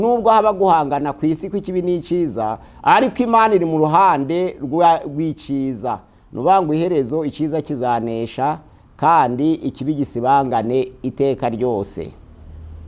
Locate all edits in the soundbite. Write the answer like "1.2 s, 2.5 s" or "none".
none